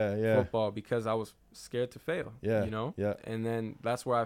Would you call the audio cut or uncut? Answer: uncut